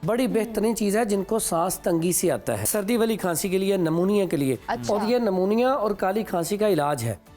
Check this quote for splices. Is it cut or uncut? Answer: cut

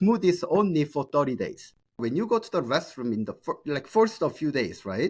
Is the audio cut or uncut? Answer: cut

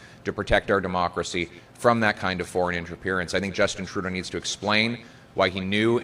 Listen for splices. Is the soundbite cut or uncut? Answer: uncut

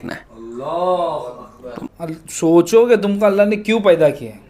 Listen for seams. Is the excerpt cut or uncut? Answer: cut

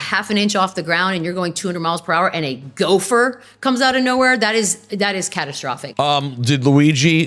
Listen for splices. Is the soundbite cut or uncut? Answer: cut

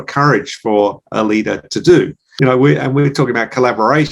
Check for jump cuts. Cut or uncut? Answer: cut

